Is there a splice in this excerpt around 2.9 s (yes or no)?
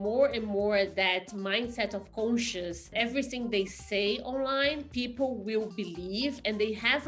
yes